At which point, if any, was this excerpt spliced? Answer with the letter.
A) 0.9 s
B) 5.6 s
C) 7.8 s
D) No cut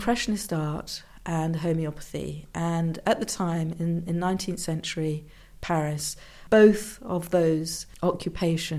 C